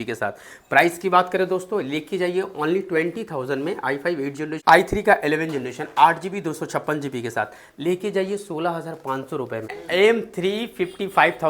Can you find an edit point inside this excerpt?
yes; 2 cuts; at 4.5 s, 9.8 s

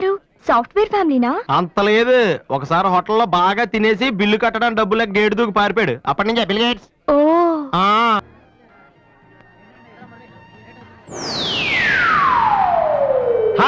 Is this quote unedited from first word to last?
yes; 0 cuts

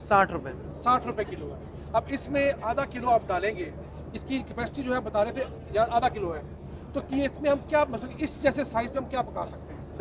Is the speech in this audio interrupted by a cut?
no; 0 cuts

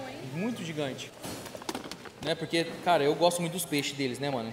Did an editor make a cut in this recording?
yes; 1 cut; at 1.1 s

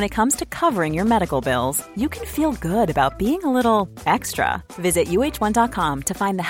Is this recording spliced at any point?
no; 0 cuts

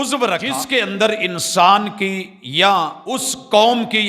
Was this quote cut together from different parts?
yes; 2 cuts; at 0.9 s, 3.1 s

